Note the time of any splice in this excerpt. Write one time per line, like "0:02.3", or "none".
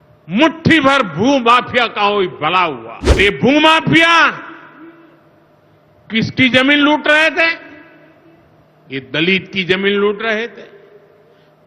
0:03.2